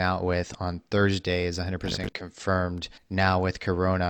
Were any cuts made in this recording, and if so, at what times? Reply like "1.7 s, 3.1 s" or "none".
2.9 s